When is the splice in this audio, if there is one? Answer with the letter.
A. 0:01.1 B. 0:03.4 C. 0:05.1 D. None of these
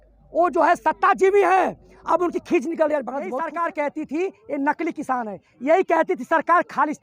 B